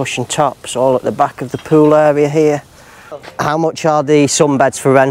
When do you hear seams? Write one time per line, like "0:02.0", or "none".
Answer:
0:03.3